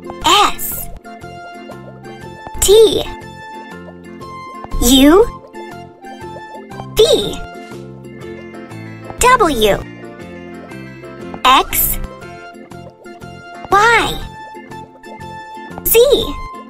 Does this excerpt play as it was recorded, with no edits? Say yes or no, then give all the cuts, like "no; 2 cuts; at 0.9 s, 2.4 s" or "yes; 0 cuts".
no; 4 cuts; at 12.1 s, 13.6 s, 14.2 s, 15.6 s